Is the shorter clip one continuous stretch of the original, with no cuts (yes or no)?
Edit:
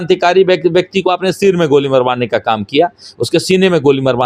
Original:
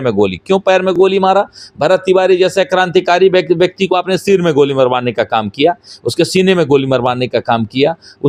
yes